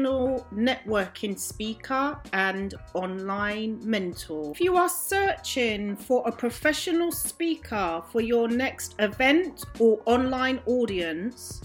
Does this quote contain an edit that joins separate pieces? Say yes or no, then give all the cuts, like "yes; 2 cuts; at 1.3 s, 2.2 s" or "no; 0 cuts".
no; 0 cuts